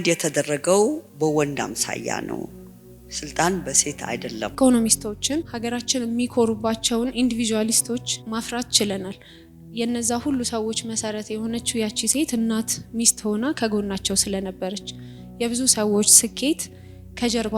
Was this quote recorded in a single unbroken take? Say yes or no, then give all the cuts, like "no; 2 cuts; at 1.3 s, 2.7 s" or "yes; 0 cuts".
no; 4 cuts; at 1.1 s, 4.5 s, 5.5 s, 8.2 s